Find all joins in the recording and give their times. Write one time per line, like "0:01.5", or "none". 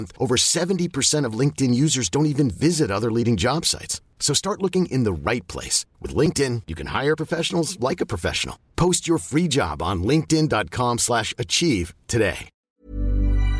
0:12.6